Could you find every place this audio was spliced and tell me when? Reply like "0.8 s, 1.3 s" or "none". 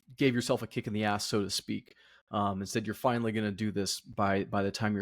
none

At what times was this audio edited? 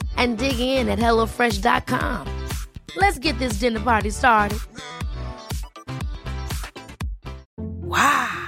7.4 s

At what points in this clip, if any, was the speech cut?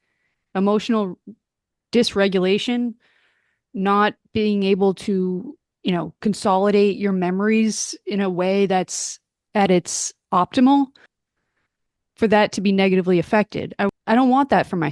14.0 s

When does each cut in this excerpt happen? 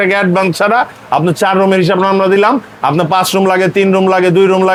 none

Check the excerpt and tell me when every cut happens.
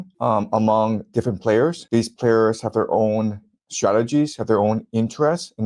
none

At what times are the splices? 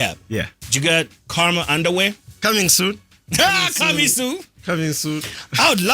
1.2 s, 2.3 s

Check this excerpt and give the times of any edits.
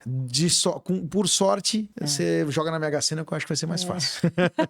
2.0 s

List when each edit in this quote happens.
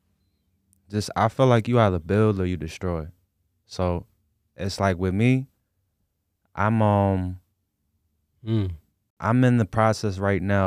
none

